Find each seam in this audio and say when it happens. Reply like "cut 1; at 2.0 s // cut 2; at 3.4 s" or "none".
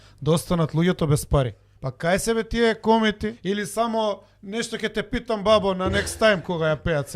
cut 1; at 1.6 s // cut 2; at 3.3 s